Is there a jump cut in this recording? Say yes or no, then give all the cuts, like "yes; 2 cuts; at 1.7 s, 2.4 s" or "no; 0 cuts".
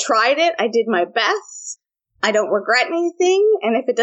no; 0 cuts